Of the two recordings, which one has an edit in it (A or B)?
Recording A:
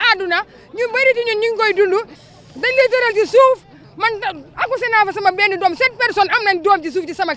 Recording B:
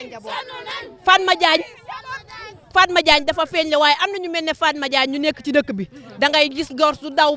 A